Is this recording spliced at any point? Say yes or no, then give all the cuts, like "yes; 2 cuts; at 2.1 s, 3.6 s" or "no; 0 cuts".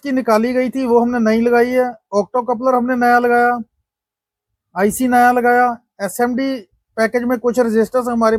no; 0 cuts